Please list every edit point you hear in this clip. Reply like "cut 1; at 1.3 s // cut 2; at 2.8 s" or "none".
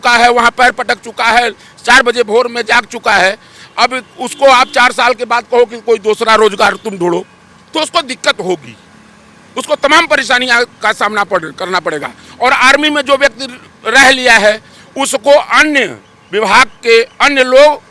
none